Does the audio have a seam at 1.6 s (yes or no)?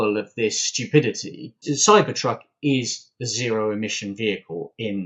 yes